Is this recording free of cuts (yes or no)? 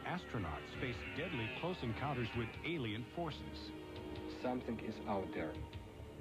yes